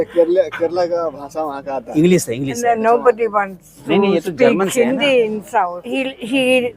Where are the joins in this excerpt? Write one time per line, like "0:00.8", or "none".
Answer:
0:05.9